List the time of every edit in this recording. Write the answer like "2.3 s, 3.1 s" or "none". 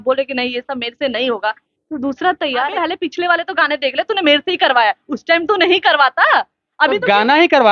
2.7 s